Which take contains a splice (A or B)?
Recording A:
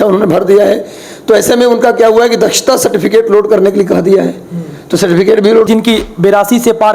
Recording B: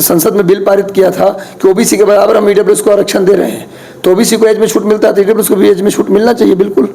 A